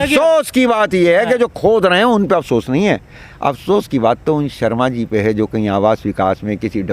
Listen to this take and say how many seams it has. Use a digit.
0